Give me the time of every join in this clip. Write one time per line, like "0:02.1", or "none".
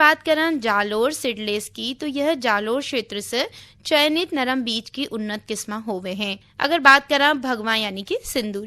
0:06.4